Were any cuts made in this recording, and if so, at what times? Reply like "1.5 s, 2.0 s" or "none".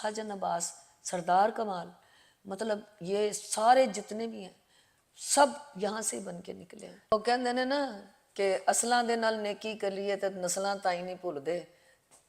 6.9 s